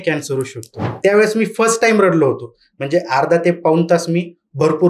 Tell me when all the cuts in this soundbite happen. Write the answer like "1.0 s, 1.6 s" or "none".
0.9 s